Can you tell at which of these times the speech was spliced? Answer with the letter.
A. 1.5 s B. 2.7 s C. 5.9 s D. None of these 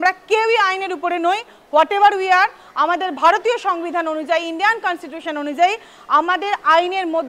D